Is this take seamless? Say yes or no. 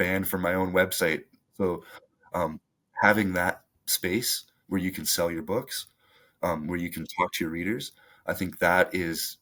yes